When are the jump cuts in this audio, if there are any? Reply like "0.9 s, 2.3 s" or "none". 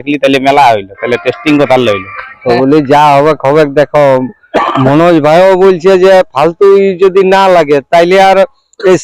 2.3 s